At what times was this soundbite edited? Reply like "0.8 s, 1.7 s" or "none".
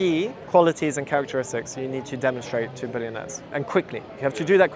none